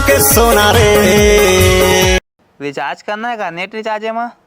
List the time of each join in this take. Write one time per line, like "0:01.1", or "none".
0:02.2